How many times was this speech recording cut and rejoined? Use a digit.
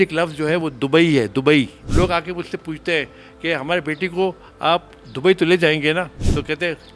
2